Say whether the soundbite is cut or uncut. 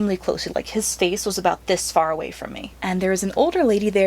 cut